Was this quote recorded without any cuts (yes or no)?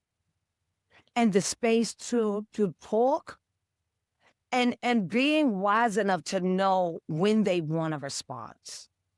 yes